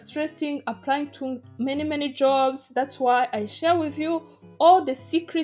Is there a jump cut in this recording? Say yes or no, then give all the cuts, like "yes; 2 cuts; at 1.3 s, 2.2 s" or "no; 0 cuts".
no; 0 cuts